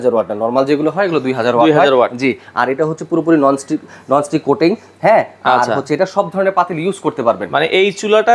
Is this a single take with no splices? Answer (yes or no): yes